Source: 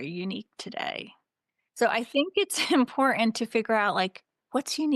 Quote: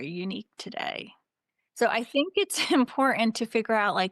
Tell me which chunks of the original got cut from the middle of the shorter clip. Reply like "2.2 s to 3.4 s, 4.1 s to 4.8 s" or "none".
none